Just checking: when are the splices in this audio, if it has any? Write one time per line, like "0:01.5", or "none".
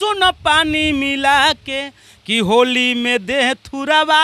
none